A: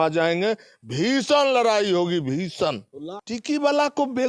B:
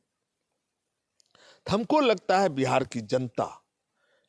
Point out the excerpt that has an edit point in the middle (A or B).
A